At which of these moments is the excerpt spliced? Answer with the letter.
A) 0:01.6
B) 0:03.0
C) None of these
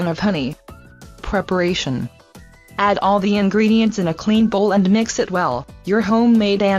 B